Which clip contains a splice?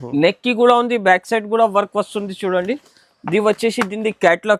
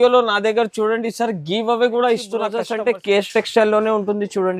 second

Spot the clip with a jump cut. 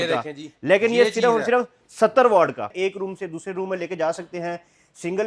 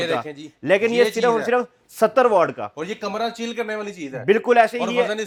first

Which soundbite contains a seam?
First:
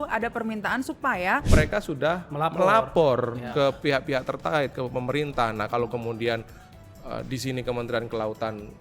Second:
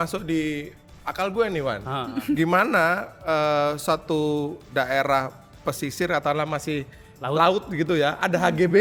first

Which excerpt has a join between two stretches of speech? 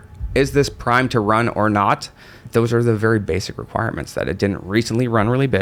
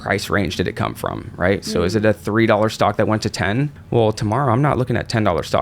second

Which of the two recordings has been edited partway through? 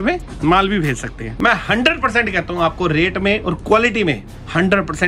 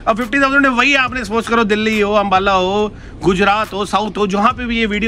first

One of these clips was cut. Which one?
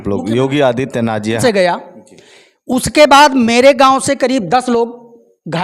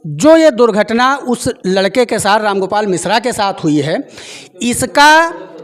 first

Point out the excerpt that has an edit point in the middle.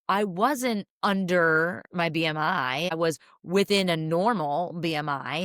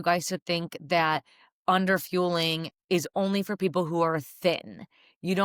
first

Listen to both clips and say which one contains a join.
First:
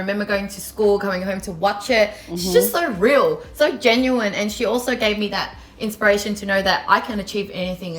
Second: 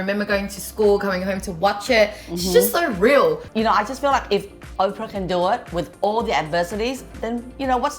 second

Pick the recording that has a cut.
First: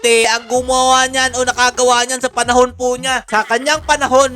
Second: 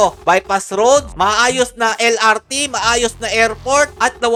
first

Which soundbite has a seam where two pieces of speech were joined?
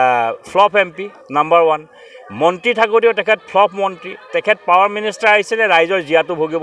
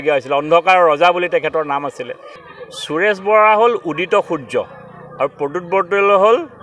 second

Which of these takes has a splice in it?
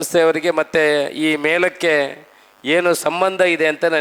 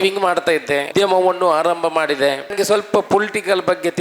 second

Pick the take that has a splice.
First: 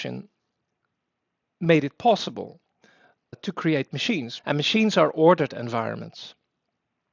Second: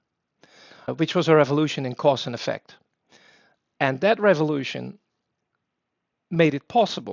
first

